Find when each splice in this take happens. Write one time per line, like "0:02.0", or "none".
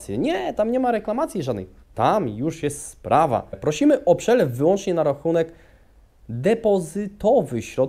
0:03.6